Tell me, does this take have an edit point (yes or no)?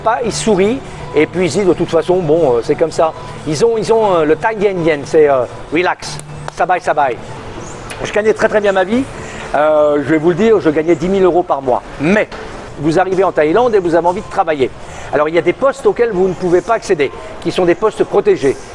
yes